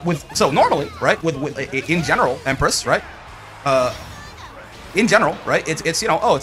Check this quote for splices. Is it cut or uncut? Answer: uncut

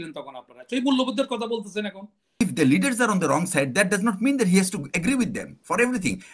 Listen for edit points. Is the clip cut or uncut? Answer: cut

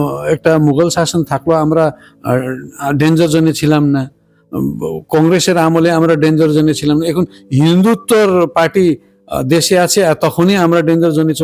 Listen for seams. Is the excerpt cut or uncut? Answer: uncut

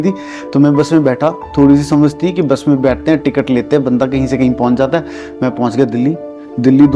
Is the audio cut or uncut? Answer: uncut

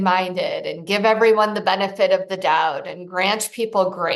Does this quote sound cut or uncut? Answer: uncut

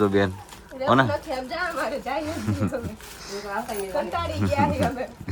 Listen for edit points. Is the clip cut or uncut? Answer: uncut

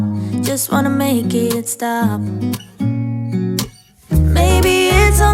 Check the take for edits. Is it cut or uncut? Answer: uncut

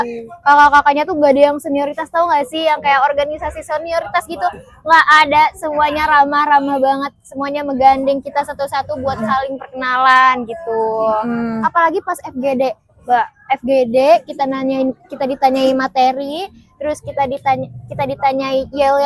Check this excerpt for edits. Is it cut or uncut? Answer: uncut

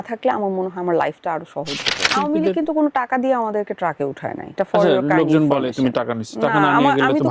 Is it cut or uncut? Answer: cut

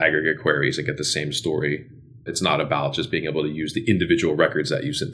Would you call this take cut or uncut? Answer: uncut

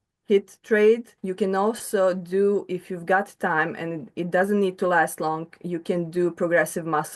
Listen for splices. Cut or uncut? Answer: cut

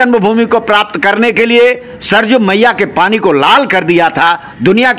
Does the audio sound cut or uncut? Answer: uncut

